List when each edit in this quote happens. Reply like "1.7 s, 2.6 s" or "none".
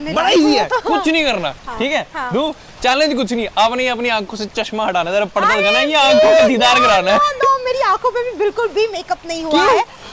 none